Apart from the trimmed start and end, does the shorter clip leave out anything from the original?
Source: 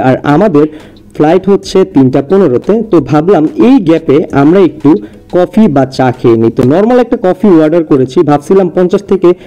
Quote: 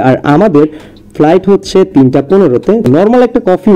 yes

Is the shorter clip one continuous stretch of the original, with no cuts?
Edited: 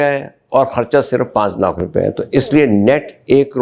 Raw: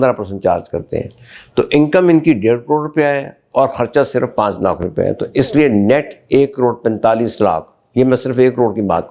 yes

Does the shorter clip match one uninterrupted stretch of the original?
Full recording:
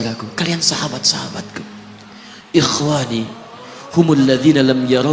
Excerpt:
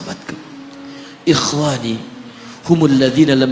yes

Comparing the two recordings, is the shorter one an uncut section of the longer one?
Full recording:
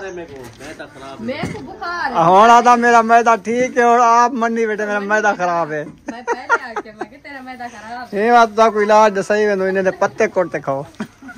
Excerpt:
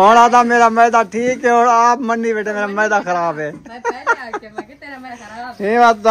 no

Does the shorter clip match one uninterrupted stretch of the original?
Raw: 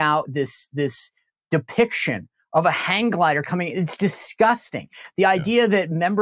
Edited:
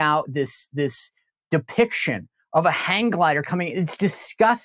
yes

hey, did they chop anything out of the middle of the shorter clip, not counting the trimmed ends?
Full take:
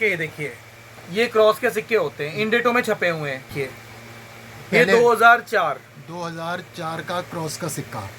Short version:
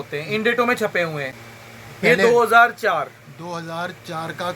yes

